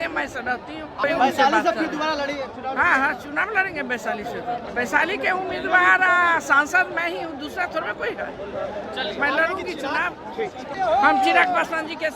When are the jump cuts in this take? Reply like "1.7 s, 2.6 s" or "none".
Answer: 1.0 s, 4.7 s, 10.7 s